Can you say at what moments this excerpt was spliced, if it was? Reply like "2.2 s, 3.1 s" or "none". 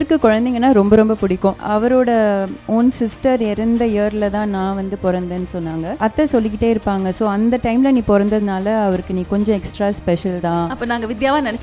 1.6 s, 6.0 s